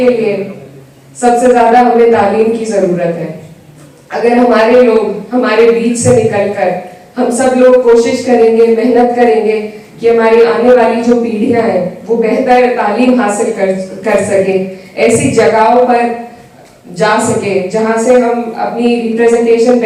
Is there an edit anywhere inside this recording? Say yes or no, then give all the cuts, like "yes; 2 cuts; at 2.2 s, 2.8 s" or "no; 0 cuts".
no; 0 cuts